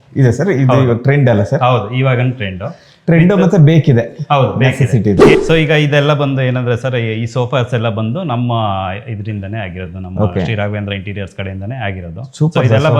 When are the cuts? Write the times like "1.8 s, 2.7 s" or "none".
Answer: 5.3 s